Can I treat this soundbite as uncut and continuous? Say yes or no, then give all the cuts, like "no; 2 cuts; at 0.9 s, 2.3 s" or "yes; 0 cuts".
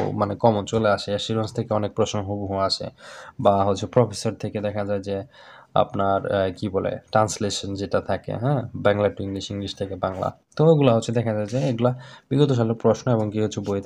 yes; 0 cuts